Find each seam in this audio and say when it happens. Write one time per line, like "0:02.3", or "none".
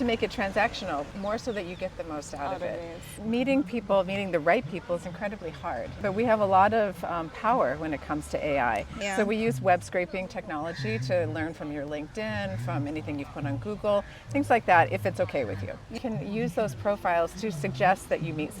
0:01.1
0:03.1
0:06.0
0:09.0
0:16.0
0:17.3